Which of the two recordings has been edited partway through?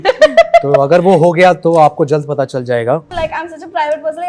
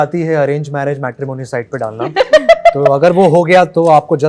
first; 1 cut; at 3.1 s

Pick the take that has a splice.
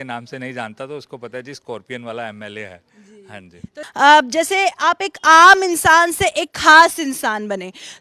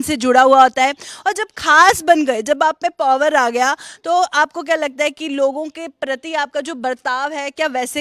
first; 1 cut; at 3.8 s

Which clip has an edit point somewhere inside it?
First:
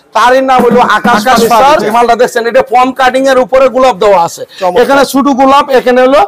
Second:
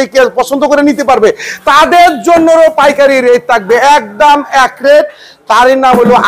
first; 1 cut; at 1.9 s

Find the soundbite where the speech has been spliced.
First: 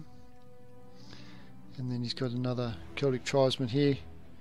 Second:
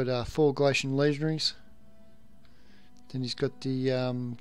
second; 1 cut; at 1.1 s

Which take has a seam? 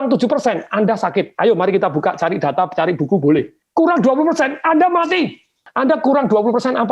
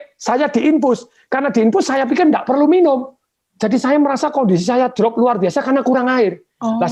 first; 2 cuts; at 3.6 s, 5.6 s

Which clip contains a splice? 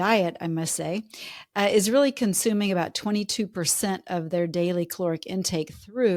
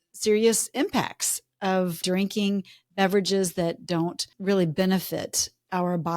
second; 2 cuts; at 2.0 s, 4.3 s

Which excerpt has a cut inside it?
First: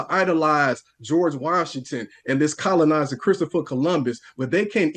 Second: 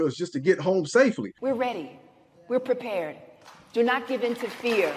second; 1 cut; at 1.4 s

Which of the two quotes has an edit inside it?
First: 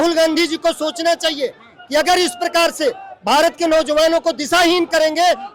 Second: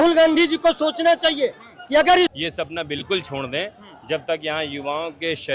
second; 1 cut; at 2.3 s

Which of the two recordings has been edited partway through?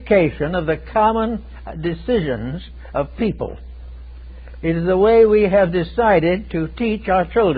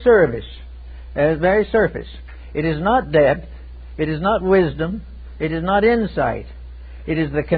second; 1 cut; at 2.8 s

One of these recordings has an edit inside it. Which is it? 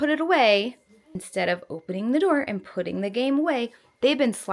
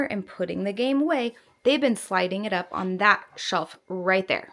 first; 1 cut; at 1.2 s

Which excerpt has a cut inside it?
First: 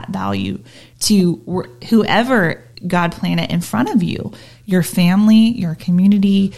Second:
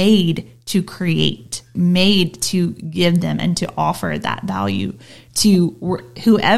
second; 1 cut; at 1.7 s

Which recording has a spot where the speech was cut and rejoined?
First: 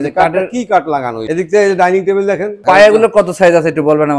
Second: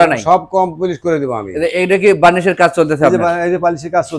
first; 2 cuts; at 1.2 s, 2.6 s

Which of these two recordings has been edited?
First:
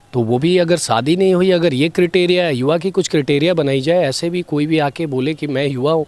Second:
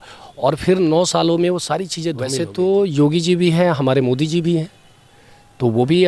second; 1 cut; at 2.2 s

